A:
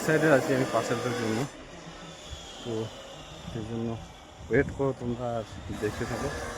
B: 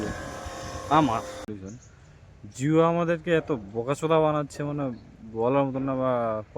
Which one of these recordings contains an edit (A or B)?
B